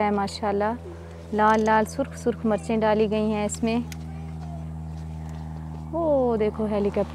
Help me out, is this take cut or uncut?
uncut